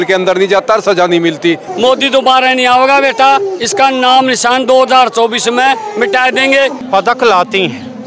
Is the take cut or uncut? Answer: cut